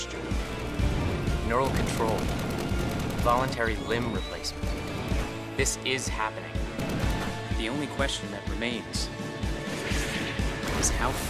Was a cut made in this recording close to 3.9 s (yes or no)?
no